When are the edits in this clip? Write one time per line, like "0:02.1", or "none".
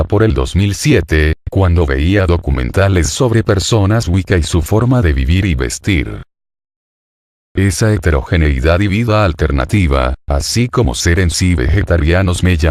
0:10.9